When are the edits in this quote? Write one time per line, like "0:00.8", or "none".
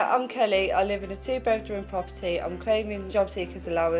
0:03.0

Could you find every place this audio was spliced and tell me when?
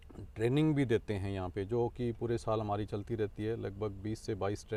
none

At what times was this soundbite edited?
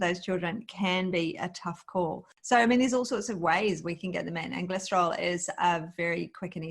0:02.3

